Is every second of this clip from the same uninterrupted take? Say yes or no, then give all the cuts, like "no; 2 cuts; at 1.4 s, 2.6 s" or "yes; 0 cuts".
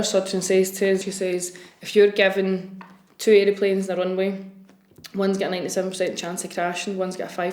no; 1 cut; at 1.1 s